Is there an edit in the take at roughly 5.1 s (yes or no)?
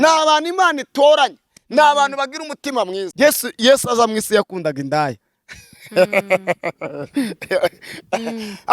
no